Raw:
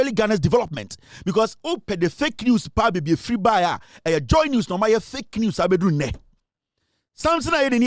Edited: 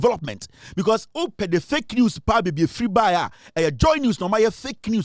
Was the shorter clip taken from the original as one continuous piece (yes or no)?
yes